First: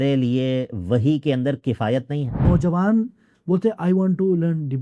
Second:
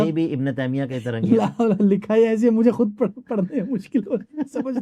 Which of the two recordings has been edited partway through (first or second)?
first